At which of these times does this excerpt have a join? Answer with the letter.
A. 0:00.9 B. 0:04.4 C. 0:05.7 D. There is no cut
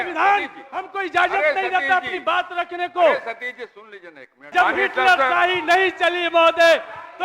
B